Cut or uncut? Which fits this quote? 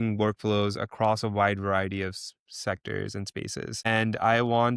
cut